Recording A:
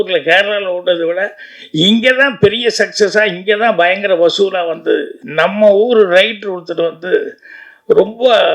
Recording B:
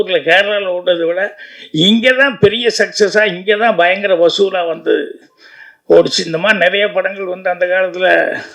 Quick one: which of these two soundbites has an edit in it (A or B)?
A